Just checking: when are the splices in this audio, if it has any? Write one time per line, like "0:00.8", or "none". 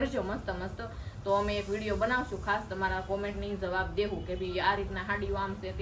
none